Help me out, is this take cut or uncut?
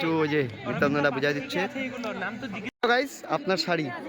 cut